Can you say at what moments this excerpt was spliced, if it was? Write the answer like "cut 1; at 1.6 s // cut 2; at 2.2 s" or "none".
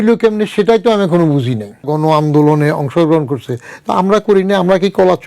cut 1; at 1.9 s